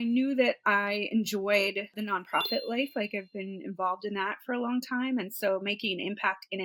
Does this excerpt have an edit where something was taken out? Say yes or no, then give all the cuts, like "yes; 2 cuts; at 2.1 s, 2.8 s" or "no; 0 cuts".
no; 0 cuts